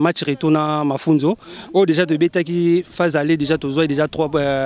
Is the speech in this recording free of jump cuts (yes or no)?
yes